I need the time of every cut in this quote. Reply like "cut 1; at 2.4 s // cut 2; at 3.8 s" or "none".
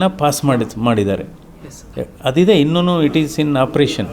none